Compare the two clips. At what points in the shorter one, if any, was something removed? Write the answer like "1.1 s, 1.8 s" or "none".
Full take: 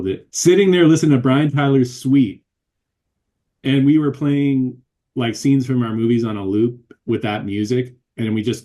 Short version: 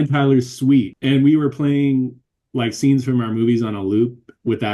0.9 s